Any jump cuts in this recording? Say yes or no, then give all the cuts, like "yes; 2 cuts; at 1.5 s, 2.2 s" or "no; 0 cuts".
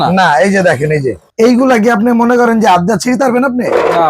yes; 1 cut; at 1.2 s